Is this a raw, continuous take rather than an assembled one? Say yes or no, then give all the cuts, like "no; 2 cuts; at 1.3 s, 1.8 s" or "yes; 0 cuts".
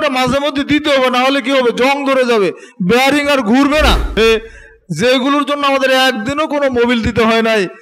no; 1 cut; at 4.2 s